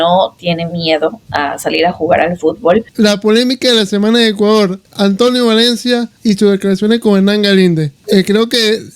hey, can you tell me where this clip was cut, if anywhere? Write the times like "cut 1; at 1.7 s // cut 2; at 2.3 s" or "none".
cut 1; at 2.9 s // cut 2; at 4.8 s // cut 3; at 6.1 s // cut 4; at 7.9 s